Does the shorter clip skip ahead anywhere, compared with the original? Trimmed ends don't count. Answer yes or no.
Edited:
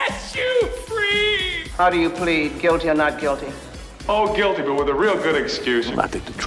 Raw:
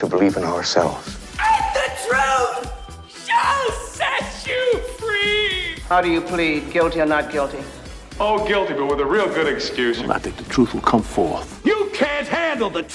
no